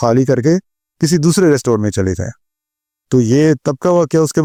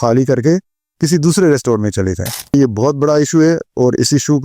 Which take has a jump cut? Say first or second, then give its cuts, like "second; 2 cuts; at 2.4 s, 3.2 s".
second; 1 cut; at 2.5 s